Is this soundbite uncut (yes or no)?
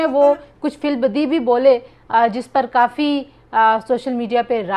yes